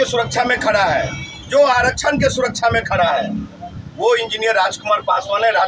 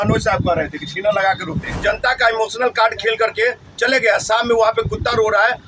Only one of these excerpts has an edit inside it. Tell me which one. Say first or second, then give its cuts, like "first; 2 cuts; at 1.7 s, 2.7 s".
second; 1 cut; at 1.8 s